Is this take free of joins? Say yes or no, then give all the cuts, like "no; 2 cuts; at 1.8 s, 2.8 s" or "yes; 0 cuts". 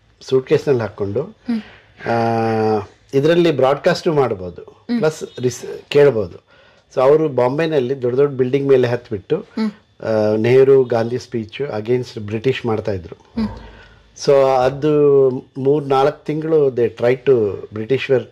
yes; 0 cuts